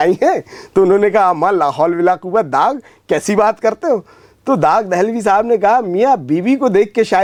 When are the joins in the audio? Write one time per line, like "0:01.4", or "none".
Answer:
none

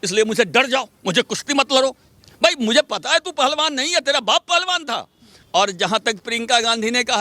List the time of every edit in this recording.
0:05.3

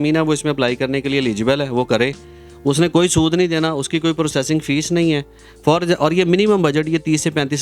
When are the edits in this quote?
none

